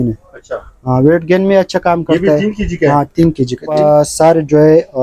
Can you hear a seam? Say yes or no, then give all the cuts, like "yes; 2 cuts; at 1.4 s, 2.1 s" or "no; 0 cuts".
yes; 1 cut; at 3.8 s